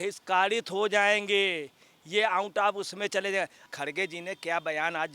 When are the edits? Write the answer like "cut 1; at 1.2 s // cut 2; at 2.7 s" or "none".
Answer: cut 1; at 3.7 s